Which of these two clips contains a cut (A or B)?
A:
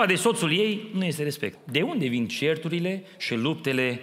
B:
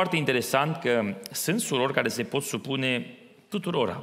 A